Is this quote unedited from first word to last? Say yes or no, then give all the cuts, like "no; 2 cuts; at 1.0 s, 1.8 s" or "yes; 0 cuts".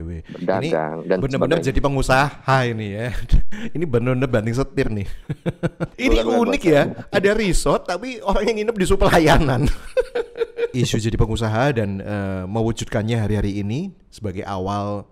no; 2 cuts; at 5.9 s, 10.7 s